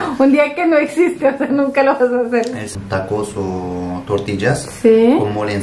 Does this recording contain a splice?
yes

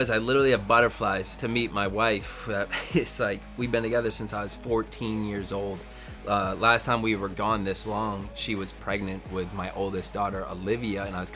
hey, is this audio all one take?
yes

